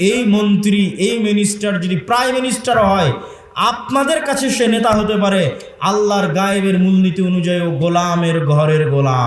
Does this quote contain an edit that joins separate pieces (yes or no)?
no